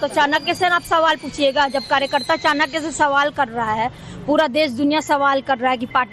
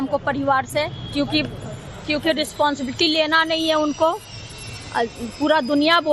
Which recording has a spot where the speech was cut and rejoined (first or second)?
second